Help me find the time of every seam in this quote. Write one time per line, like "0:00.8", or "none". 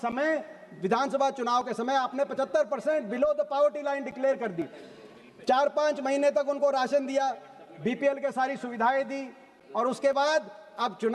none